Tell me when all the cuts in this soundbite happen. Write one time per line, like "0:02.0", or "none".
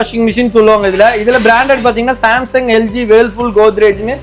none